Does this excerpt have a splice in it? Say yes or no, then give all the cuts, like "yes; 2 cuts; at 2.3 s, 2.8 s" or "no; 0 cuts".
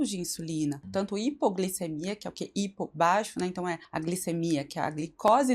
yes; 2 cuts; at 0.8 s, 3.9 s